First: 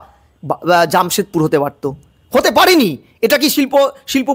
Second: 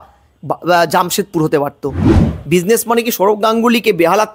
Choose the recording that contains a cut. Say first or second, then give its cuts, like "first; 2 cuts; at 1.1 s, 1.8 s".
second; 1 cut; at 2.2 s